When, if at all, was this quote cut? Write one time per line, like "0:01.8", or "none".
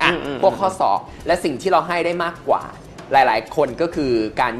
none